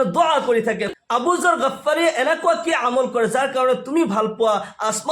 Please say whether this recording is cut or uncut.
cut